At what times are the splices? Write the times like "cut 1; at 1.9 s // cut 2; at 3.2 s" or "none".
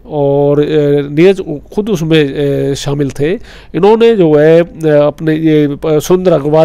none